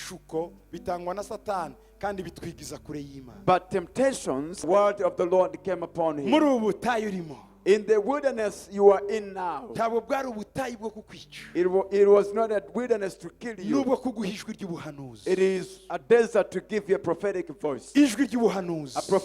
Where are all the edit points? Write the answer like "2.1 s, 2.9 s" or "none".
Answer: 4.5 s